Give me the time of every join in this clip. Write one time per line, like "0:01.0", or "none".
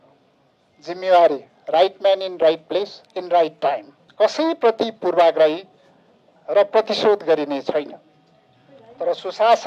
0:04.0